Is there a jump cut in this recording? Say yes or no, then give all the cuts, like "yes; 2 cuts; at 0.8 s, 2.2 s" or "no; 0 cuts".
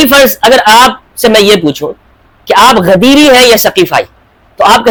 no; 0 cuts